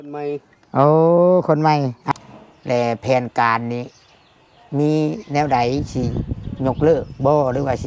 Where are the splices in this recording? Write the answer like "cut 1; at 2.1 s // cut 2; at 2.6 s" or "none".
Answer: cut 1; at 2.0 s